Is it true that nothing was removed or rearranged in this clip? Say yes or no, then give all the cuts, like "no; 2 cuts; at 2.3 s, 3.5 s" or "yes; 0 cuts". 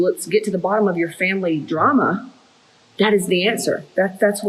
yes; 0 cuts